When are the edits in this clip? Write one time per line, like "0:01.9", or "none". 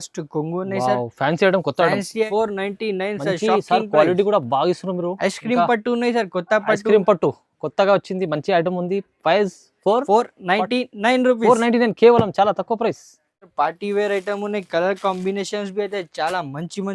0:02.3
0:13.5